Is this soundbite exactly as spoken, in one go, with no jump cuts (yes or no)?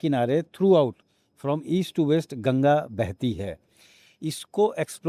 yes